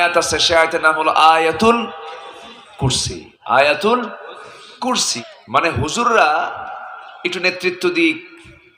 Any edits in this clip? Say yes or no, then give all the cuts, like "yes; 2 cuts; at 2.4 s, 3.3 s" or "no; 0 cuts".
yes; 1 cut; at 5.1 s